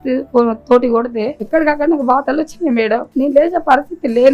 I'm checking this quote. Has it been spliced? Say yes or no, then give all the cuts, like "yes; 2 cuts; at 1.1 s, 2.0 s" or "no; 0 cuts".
yes; 2 cuts; at 1.4 s, 3.1 s